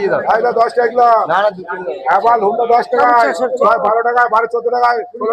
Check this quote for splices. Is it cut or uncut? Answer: uncut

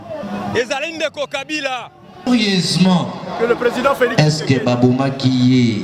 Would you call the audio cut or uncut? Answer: cut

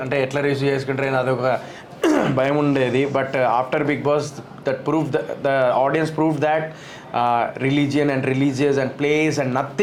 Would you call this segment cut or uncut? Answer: uncut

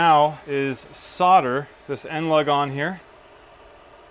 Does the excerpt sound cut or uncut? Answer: cut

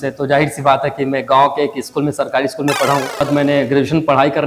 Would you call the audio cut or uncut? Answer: cut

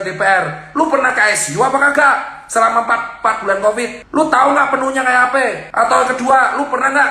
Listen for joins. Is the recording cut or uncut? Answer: cut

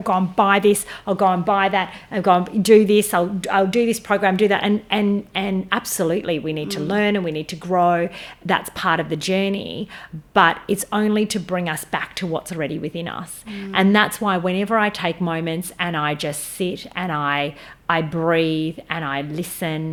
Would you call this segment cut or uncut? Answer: uncut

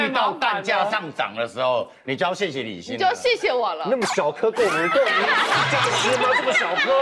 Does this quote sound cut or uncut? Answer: uncut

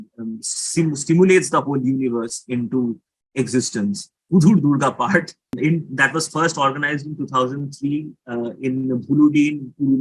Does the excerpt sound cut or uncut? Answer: cut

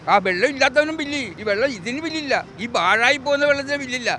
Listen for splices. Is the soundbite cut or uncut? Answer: cut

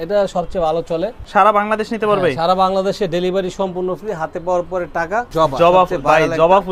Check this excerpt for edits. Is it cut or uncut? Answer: cut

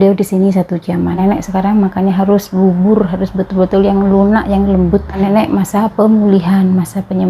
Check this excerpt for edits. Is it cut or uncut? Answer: cut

